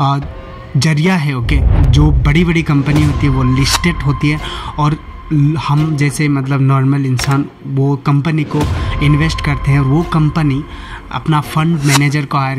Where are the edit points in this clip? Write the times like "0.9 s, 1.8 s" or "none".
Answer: none